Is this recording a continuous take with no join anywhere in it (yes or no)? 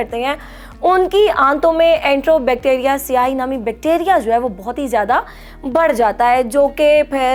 yes